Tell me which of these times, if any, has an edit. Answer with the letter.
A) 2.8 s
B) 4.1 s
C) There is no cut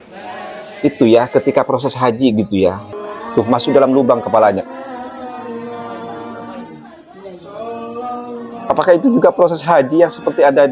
A